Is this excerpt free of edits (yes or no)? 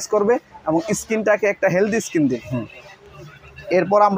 yes